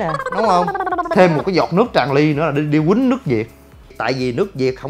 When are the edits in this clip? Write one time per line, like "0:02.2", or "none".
0:01.1
0:04.0